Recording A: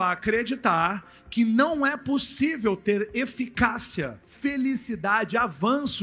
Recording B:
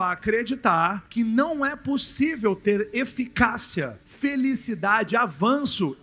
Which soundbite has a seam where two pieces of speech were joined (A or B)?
B